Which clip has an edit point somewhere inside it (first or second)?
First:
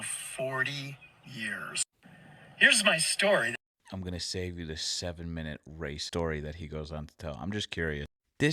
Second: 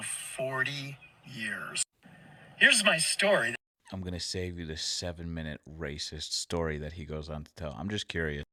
first